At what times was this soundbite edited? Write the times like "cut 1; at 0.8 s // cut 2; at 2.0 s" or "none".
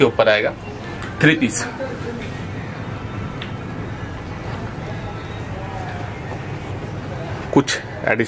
none